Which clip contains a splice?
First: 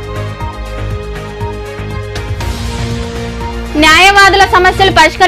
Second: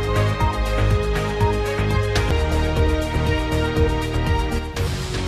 first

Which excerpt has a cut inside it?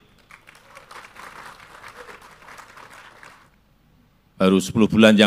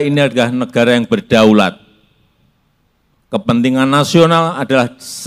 first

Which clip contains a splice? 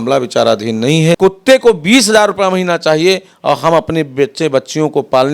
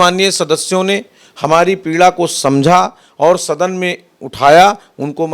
first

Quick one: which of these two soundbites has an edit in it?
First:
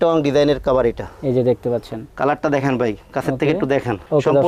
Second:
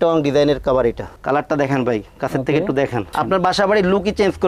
second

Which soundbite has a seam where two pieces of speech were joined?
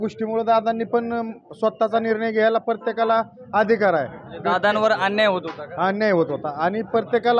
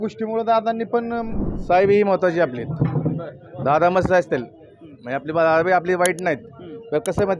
second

